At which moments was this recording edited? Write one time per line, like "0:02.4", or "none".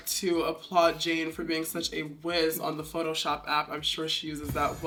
none